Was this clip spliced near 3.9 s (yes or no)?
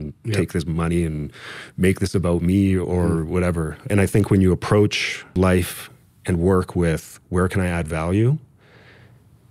yes